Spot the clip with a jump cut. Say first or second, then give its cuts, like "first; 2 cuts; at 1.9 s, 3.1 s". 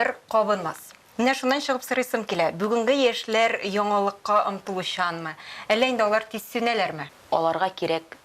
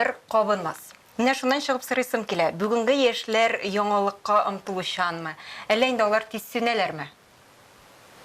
first; 1 cut; at 7.1 s